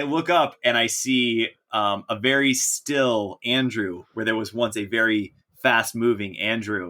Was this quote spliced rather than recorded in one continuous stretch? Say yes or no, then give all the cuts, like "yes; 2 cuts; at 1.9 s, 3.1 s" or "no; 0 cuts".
no; 0 cuts